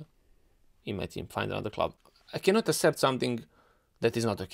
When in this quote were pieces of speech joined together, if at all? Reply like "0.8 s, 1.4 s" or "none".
2.0 s